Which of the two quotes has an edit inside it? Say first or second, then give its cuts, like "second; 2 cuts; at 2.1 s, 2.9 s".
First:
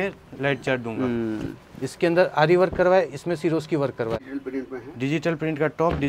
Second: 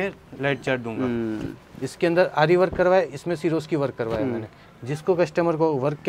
first; 1 cut; at 4.2 s